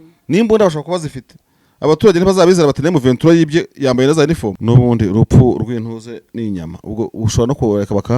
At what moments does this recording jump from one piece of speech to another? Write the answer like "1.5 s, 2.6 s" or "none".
4.5 s